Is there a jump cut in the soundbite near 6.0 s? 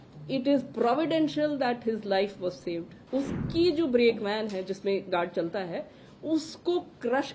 no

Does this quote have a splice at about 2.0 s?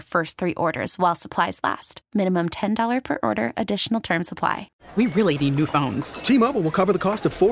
no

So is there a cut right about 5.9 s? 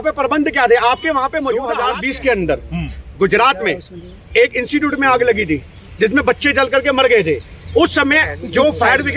no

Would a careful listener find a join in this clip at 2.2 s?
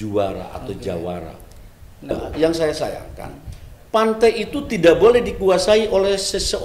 yes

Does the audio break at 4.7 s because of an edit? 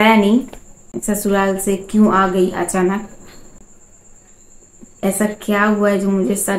no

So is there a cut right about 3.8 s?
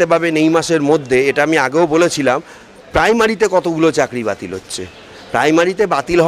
no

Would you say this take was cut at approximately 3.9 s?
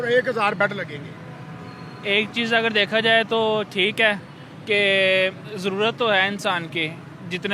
no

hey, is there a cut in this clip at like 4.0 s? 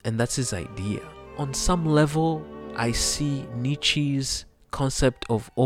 no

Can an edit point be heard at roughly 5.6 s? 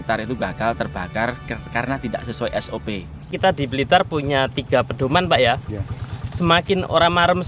no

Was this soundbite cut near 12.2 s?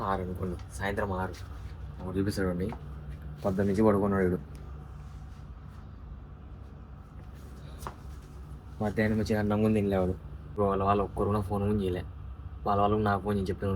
no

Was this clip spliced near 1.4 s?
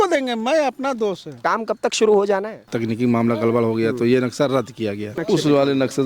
yes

